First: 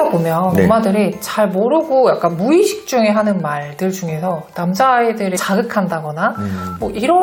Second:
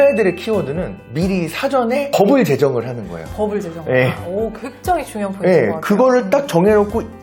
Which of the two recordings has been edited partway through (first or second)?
second